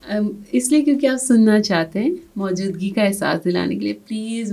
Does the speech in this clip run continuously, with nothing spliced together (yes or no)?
yes